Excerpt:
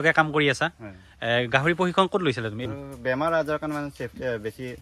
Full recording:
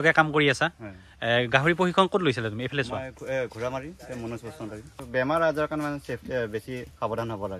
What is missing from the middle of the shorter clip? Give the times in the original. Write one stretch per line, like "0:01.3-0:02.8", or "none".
0:02.6-0:04.7